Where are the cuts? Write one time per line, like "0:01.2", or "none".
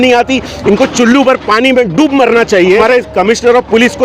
0:02.8